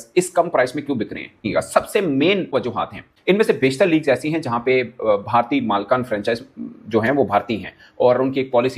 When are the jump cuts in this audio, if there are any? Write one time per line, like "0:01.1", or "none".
none